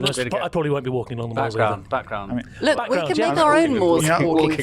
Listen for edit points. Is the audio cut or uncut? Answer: uncut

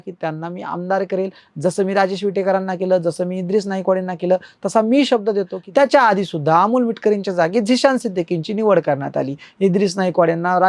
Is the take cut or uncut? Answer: cut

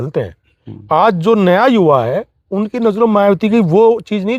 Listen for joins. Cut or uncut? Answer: uncut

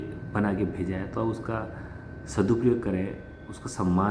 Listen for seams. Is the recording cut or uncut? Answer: uncut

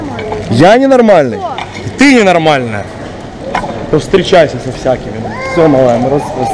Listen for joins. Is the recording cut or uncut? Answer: uncut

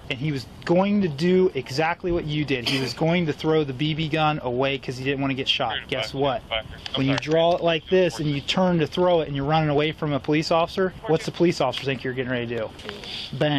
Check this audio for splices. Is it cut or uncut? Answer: uncut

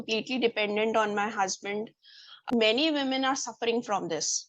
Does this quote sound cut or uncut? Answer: cut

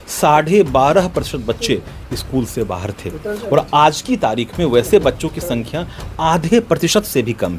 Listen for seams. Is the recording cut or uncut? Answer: uncut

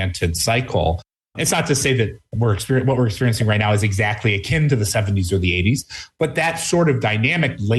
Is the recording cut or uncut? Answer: cut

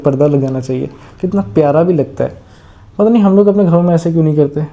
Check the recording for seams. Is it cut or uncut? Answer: uncut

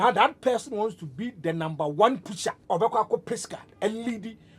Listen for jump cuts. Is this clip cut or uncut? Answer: cut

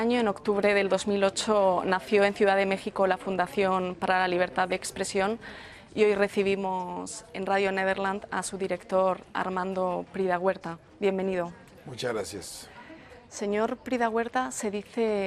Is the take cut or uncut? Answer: uncut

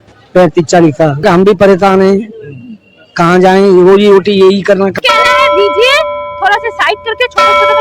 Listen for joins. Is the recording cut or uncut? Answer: cut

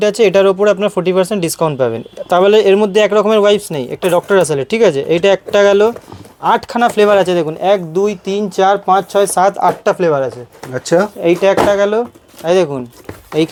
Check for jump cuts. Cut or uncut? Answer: uncut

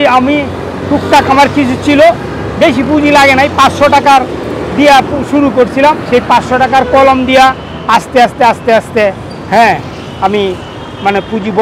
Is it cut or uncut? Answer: uncut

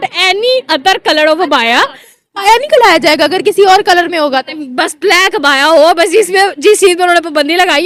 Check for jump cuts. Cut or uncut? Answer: uncut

